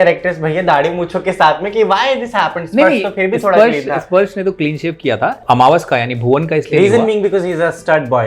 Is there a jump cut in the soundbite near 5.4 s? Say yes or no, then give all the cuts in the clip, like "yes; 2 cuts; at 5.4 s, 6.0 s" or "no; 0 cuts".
yes; 1 cut; at 5.4 s